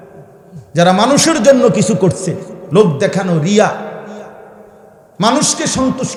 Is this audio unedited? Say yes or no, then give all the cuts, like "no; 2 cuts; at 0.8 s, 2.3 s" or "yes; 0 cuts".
yes; 0 cuts